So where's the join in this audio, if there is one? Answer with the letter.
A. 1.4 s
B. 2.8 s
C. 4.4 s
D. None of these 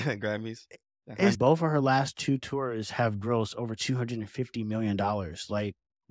A